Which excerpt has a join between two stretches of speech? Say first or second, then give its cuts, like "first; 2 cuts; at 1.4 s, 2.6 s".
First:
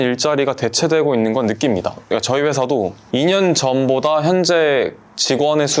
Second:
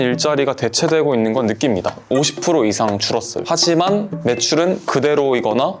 second; 1 cut; at 2.1 s